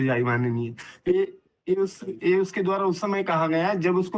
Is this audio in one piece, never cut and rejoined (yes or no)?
yes